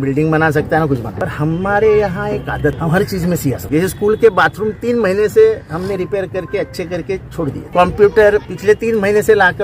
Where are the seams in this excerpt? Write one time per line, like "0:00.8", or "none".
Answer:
0:01.1
0:02.8
0:03.6
0:07.6
0:08.5